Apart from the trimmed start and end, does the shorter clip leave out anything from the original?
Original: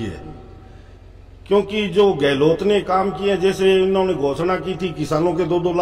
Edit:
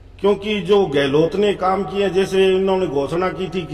no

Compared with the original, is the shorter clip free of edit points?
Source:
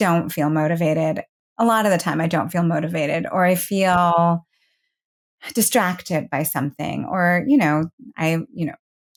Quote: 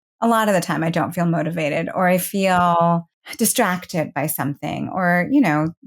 no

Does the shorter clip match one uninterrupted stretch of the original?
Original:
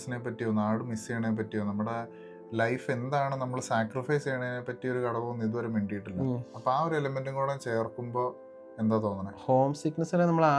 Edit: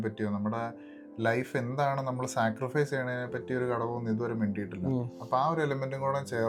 yes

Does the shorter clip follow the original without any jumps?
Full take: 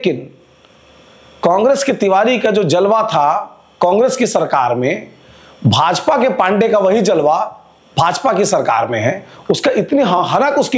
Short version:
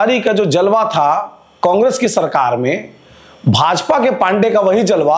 yes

